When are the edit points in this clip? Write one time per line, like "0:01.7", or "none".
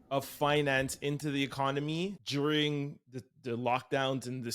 0:02.2

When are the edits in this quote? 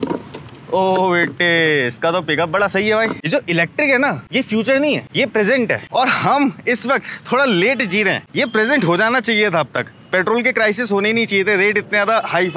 0:03.2
0:04.2
0:05.1
0:05.8
0:08.2

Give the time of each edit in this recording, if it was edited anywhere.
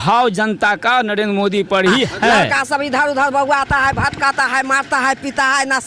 0:02.5

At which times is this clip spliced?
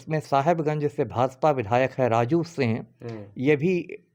none

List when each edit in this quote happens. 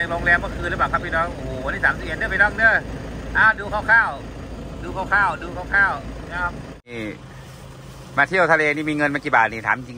0:06.9

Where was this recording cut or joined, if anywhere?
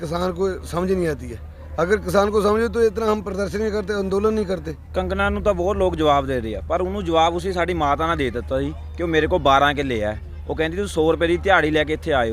0:04.8

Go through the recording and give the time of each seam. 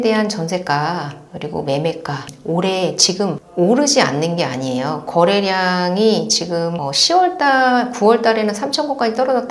none

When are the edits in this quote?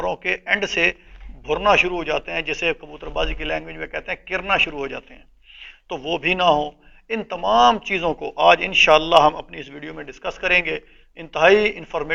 none

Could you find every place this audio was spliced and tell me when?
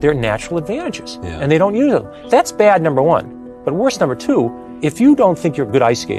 0:02.1
0:04.6

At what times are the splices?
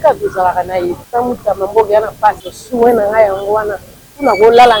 0:01.0
0:02.5

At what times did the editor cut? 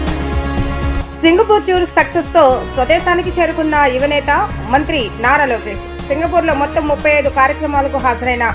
0:00.9

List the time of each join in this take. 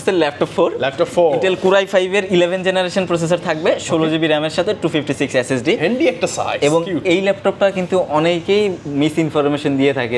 none

